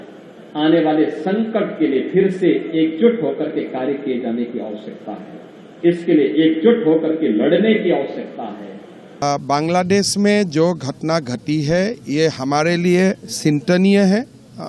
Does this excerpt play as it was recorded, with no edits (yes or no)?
no